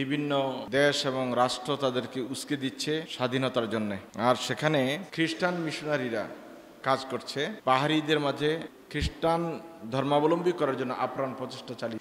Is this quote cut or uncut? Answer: cut